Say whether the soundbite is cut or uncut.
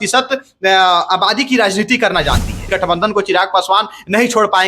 cut